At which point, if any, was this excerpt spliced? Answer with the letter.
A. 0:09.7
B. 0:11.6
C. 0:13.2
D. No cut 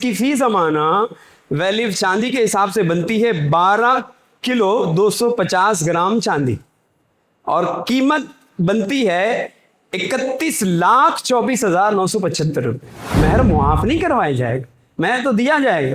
C